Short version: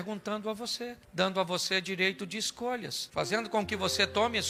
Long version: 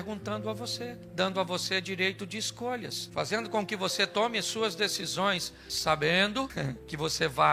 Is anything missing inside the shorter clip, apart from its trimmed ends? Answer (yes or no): no